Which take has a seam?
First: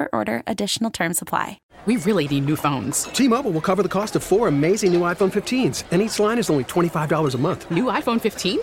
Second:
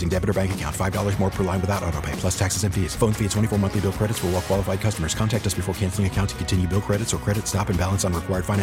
first; 1 cut; at 1.6 s

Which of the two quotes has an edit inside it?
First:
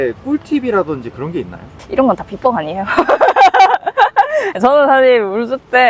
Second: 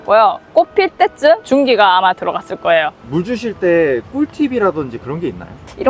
second; 1 cut; at 3.0 s

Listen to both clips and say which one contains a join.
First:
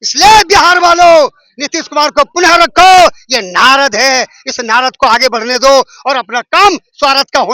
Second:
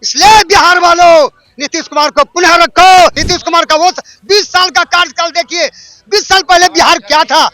second; 1 cut; at 3.2 s

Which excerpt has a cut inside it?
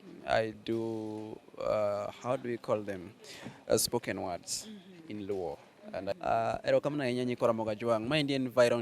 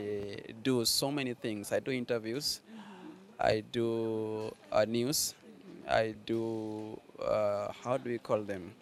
first; 1 cut; at 6.1 s

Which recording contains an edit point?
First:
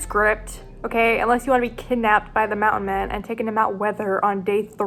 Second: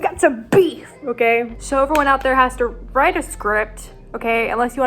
second; 1 cut; at 1.6 s

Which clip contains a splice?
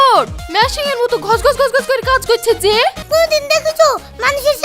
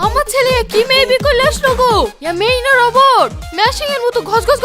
first; 1 cut; at 3.0 s

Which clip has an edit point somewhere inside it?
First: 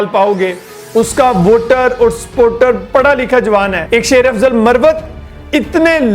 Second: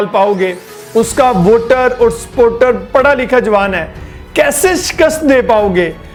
first; 1 cut; at 3.8 s

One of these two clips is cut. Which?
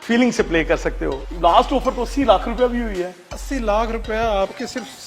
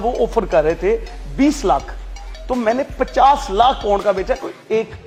first; 1 cut; at 1.3 s

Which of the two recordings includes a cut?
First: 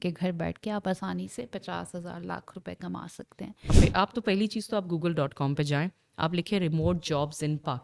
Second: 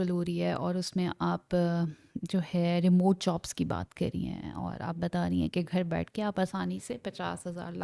first; 1 cut; at 3.7 s

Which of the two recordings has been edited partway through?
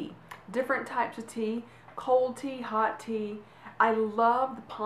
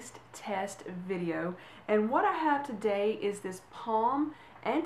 first; 1 cut; at 2.9 s

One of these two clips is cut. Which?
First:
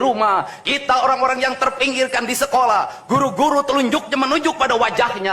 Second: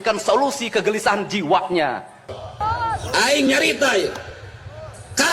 second; 1 cut; at 2.3 s

